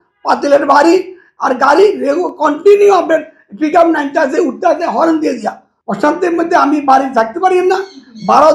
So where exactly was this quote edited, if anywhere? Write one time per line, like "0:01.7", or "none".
0:05.7